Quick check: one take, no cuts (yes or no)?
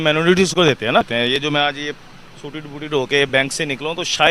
no